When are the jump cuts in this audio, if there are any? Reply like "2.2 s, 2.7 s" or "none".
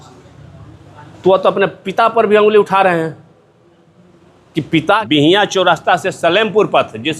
5.0 s